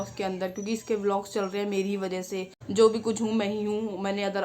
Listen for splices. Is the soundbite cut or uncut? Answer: cut